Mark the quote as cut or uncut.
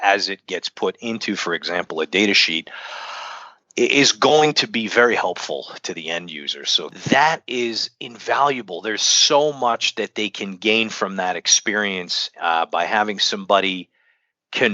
cut